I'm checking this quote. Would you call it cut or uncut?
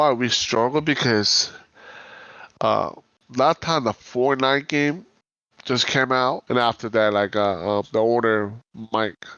cut